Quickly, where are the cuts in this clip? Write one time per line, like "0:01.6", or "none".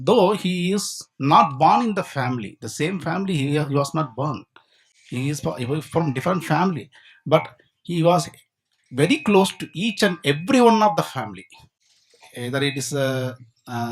none